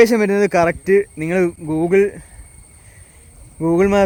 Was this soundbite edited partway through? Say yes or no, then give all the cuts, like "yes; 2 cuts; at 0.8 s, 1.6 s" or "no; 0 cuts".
no; 0 cuts